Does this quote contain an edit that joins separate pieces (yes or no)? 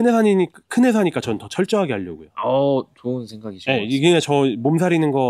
no